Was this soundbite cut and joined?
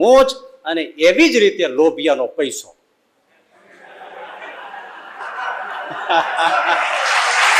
no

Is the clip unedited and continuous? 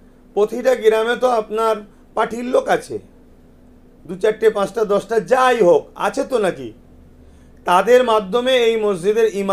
yes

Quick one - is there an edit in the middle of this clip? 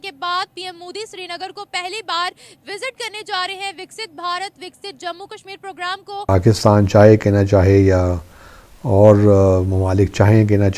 yes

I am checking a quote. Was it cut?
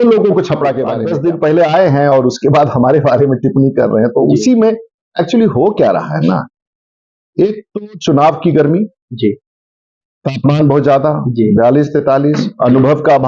yes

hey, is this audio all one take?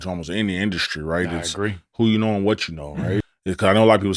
no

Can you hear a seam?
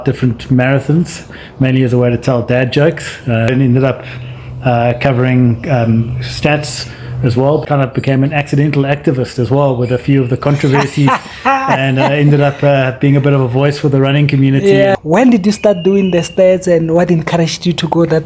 yes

